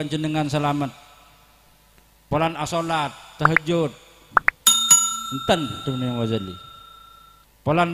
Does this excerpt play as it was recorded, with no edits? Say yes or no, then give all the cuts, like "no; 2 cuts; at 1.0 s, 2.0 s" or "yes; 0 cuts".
no; 2 cuts; at 4.2 s, 5.1 s